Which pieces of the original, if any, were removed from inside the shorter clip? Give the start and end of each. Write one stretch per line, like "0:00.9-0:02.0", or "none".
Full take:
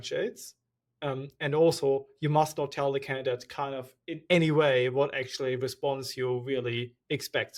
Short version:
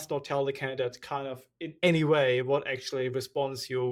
none